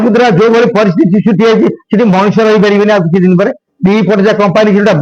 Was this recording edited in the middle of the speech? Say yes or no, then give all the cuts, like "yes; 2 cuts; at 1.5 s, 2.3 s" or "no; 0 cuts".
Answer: no; 0 cuts